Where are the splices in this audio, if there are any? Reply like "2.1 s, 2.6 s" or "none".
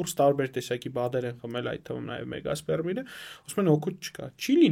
none